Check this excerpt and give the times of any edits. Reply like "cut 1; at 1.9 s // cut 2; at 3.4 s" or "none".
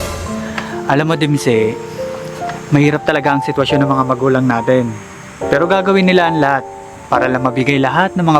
none